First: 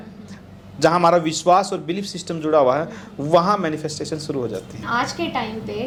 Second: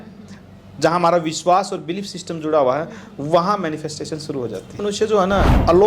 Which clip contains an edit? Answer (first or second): second